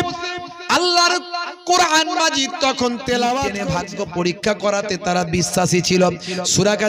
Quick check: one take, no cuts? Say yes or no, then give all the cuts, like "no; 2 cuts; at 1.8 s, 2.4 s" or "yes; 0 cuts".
no; 1 cut; at 3.6 s